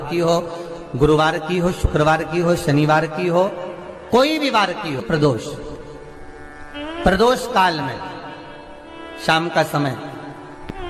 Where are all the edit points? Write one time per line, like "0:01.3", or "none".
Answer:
0:05.0